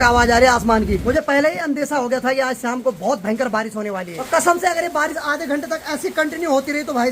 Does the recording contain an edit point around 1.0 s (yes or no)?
yes